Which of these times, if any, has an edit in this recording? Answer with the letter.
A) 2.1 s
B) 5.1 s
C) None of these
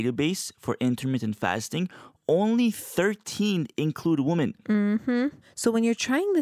B